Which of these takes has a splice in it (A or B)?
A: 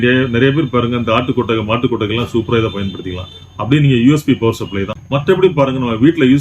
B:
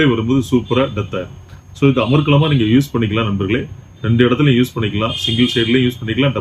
A